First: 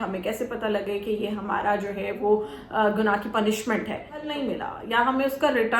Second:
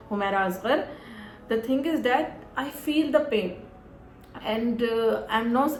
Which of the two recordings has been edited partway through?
first; 1 cut; at 4.3 s

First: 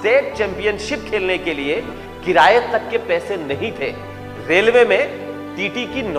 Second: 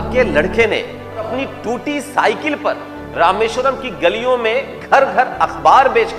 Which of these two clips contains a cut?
second; 1 cut; at 1.3 s

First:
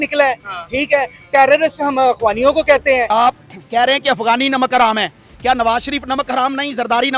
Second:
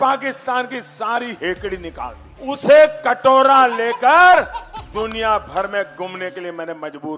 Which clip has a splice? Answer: first; 1 cut; at 3.1 s

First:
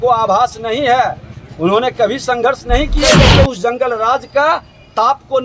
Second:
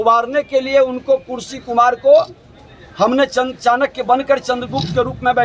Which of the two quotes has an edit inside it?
first; 1 cut; at 3.1 s

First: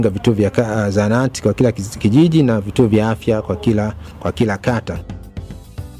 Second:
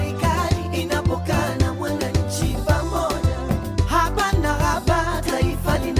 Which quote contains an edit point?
first; 1 cut; at 5.0 s

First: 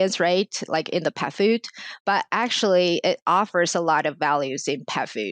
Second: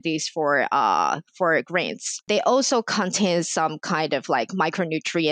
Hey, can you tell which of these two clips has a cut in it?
second; 1 cut; at 2.2 s

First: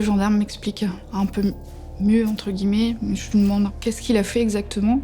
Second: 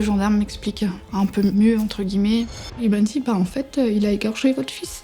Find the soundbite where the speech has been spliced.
second; 2 cuts; at 1.5 s, 2.8 s

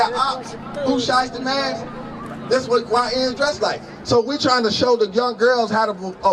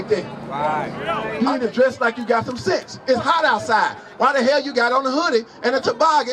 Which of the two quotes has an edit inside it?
second; 1 cut; at 1.2 s

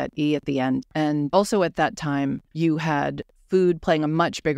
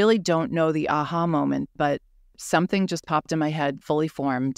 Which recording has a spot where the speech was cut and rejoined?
first; 3 cuts; at 1.1 s, 2.5 s, 3.3 s

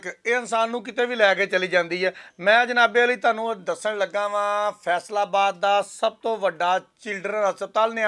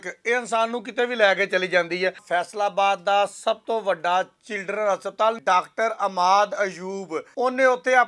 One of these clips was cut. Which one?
second; 3 cuts; at 2.2 s, 5.4 s, 7.2 s

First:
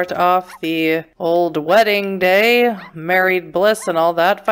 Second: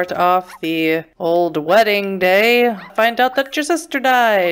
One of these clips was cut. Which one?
second; 1 cut; at 2.9 s

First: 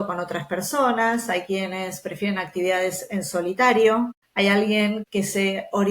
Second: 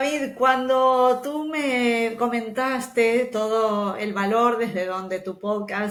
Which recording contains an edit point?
first; 2 cuts; at 4.2 s, 5.0 s

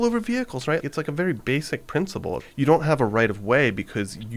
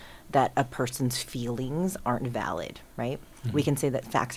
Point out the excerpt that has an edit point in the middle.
first; 2 cuts; at 0.8 s, 2.4 s

